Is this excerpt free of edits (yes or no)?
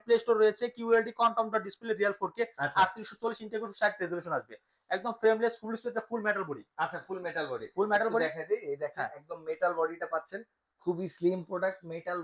yes